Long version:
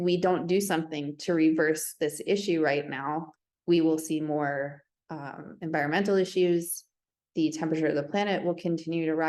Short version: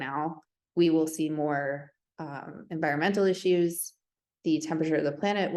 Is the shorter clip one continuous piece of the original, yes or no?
yes